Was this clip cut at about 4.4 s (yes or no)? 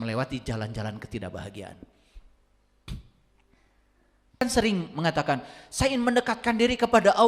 yes